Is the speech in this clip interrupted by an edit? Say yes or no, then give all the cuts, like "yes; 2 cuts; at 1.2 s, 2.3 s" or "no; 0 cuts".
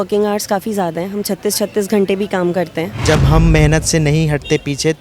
yes; 1 cut; at 3.0 s